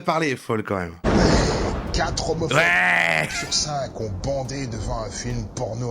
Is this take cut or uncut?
cut